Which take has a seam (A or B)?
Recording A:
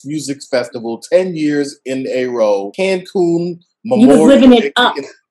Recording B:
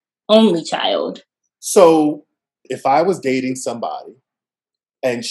B